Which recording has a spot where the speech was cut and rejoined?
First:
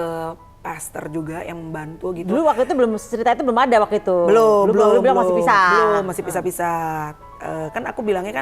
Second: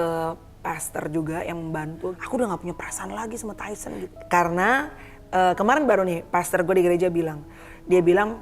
second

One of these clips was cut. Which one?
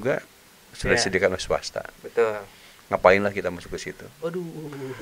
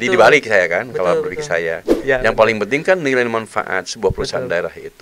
second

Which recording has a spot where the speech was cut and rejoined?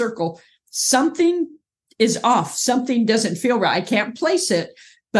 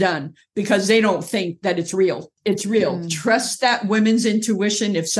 second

